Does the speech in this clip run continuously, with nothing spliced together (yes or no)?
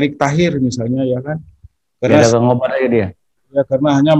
yes